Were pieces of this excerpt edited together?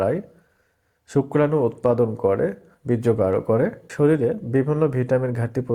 yes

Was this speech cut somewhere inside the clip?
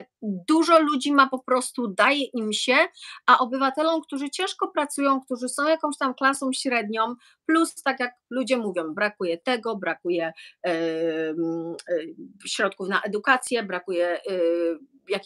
no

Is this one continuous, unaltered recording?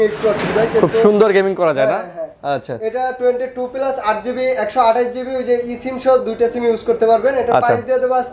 yes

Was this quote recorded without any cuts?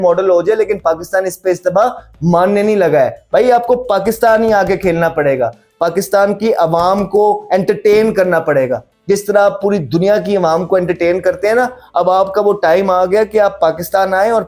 yes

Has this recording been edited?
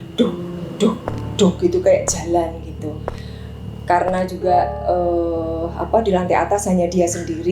no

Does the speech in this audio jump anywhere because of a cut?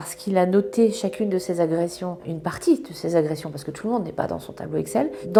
no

